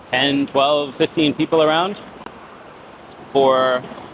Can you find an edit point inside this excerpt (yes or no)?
no